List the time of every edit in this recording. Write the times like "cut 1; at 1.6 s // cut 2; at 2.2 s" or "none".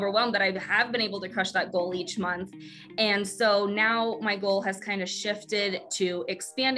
none